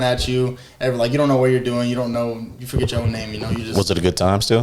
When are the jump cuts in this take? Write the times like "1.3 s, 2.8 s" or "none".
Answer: none